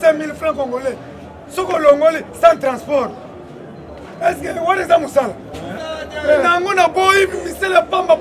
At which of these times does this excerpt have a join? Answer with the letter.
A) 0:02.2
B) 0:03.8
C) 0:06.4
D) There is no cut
D